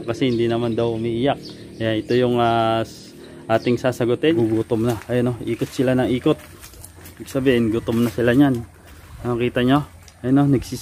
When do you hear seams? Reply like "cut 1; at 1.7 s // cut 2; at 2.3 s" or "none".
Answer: cut 1; at 4.4 s